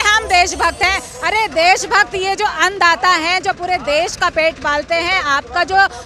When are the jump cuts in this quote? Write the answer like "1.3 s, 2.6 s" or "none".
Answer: none